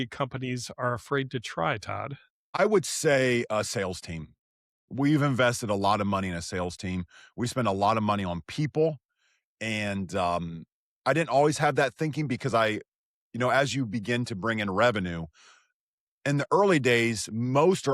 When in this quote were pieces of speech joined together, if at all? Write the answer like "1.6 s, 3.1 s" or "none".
2.6 s